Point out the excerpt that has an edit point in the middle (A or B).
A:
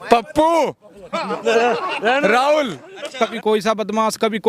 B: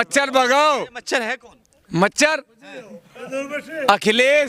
A